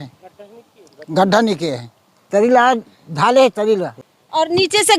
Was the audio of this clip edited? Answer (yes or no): yes